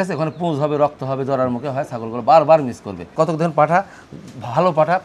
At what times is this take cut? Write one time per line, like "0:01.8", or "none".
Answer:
0:03.1